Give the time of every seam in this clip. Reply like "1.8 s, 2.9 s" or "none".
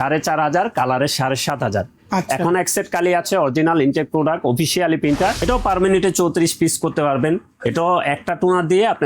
5.4 s

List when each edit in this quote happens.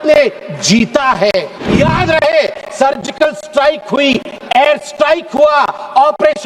1.6 s

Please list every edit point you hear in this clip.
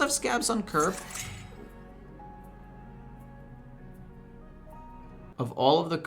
5.1 s

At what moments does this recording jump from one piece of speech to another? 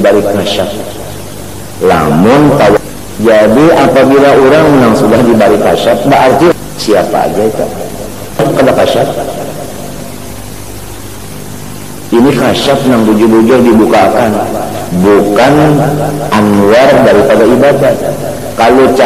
2.8 s, 6.5 s, 8.4 s

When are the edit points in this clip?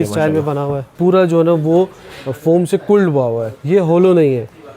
0.9 s, 3.5 s

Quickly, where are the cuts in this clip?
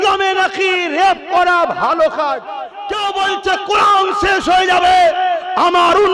2.8 s

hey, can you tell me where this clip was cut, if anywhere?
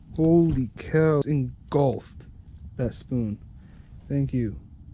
1.2 s

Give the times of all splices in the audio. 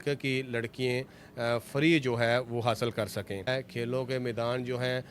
3.5 s

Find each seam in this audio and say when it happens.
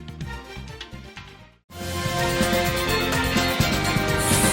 1.5 s

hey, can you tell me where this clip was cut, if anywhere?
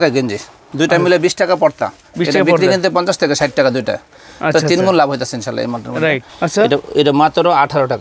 none

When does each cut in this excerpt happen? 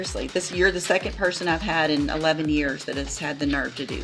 none

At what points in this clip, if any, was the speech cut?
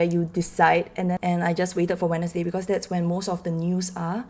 1.2 s

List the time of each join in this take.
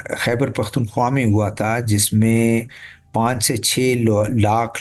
none

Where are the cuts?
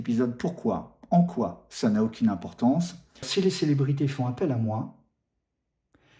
3.3 s

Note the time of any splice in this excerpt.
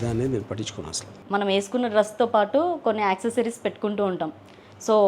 1.1 s

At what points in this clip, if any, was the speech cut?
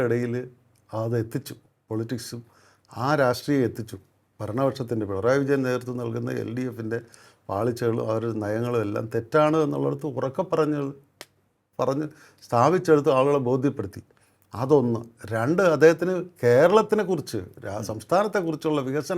none

